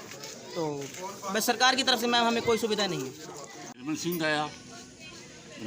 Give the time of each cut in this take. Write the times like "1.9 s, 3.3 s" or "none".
3.8 s